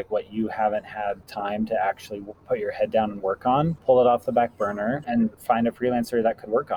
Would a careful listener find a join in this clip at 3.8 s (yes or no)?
yes